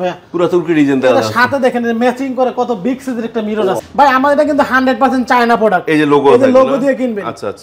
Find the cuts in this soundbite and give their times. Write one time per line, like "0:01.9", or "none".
0:03.8